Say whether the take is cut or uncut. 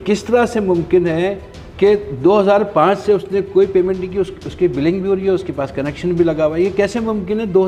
uncut